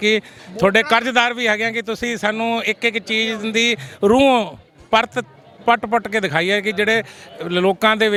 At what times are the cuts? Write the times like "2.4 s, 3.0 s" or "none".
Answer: none